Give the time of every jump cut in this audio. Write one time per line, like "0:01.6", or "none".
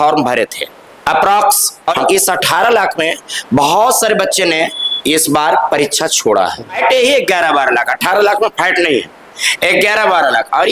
0:01.9
0:06.8

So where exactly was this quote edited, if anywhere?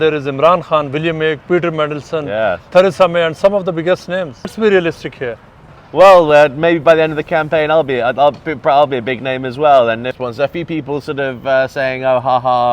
0:04.5
0:10.1

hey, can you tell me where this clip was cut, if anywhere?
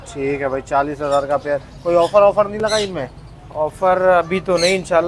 none

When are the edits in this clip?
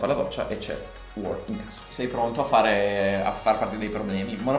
0:01.0
0:01.8

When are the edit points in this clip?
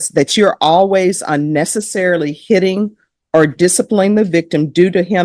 none

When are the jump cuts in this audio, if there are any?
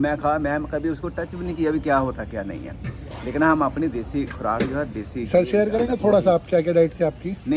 none

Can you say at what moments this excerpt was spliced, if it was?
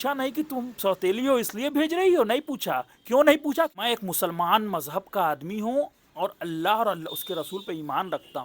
0:03.8

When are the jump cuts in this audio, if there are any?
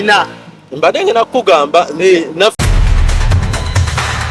0:02.6

